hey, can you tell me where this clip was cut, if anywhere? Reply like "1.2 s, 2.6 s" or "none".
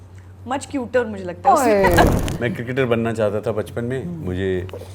2.1 s